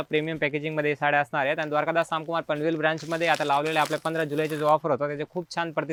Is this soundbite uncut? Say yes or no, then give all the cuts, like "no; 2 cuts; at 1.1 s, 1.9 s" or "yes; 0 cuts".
yes; 0 cuts